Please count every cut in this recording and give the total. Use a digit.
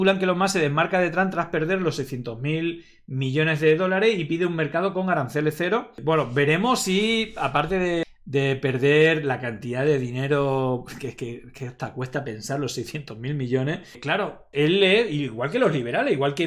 0